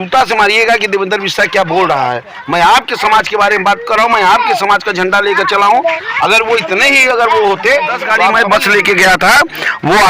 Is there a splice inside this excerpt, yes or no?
yes